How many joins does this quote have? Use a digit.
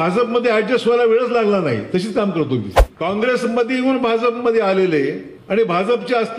2